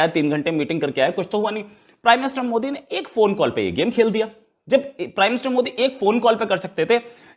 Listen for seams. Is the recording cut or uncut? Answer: uncut